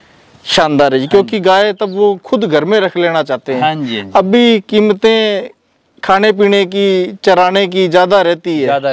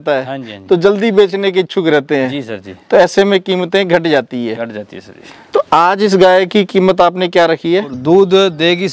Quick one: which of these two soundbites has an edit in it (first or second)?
second